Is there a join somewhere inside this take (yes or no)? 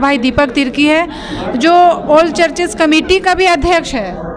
no